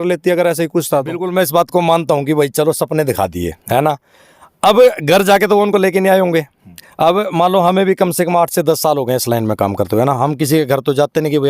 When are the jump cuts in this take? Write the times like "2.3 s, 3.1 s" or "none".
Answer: 1.3 s